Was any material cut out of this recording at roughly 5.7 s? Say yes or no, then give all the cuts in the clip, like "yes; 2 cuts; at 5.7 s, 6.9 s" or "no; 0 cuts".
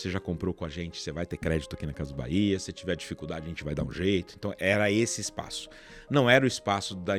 no; 0 cuts